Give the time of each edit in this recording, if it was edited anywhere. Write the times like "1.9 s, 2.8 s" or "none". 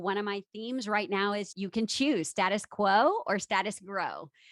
1.5 s